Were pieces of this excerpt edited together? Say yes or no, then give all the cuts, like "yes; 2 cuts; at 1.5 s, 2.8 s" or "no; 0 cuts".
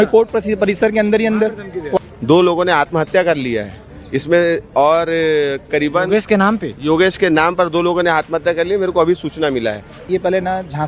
yes; 2 cuts; at 2.0 s, 10.0 s